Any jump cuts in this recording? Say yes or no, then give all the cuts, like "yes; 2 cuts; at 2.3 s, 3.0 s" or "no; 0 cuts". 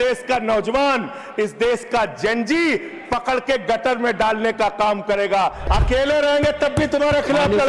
yes; 1 cut; at 5.6 s